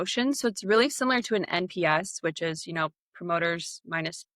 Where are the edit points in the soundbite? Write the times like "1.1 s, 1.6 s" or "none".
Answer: none